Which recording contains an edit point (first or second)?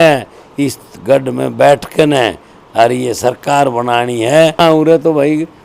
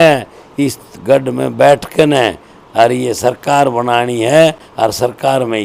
first